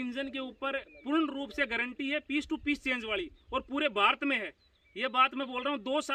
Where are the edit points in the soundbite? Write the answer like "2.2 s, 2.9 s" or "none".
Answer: none